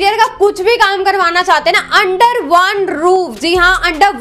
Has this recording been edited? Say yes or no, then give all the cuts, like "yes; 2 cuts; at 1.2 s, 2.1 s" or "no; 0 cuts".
no; 0 cuts